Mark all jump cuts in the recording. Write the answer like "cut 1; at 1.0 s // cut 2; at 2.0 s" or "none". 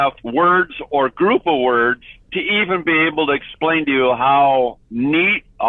none